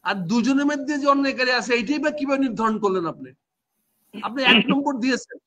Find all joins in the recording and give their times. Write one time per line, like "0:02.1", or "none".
none